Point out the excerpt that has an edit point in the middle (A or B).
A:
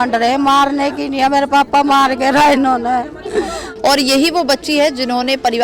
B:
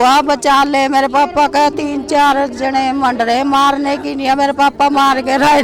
A